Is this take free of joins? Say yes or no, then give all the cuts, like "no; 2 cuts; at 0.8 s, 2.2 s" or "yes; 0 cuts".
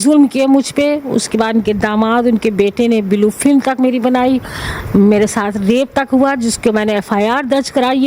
yes; 0 cuts